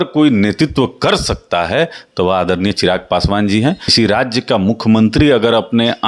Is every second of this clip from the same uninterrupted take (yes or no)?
no